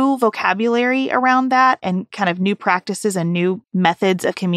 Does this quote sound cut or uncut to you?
cut